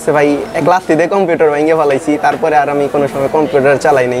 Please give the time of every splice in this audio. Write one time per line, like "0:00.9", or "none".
none